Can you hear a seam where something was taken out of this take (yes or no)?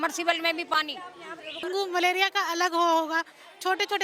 yes